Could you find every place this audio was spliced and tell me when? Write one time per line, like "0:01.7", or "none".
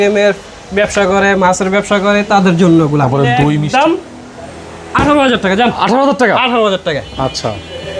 0:03.6